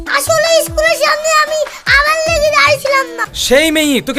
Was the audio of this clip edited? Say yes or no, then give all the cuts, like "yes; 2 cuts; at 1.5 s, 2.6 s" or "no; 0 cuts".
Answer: yes; 1 cut; at 3.3 s